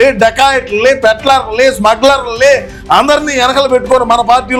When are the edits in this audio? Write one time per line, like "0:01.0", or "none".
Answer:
none